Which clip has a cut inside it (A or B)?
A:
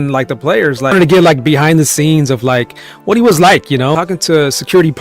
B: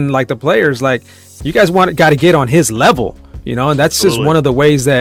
A